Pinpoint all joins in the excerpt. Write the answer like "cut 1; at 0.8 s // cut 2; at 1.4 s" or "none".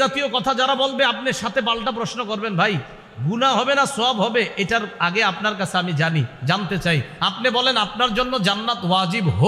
none